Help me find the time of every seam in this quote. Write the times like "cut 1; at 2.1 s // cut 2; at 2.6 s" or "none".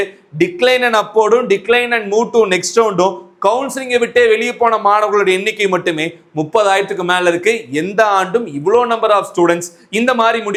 none